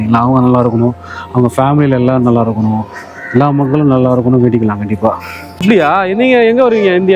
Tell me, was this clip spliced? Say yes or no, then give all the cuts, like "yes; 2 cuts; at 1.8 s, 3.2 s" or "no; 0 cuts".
yes; 1 cut; at 5.6 s